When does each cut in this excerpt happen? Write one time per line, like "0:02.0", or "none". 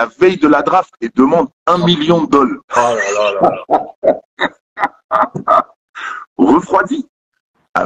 none